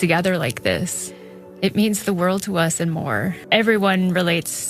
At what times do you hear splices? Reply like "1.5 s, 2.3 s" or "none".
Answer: 3.4 s